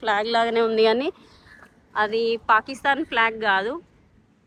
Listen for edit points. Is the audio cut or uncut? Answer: uncut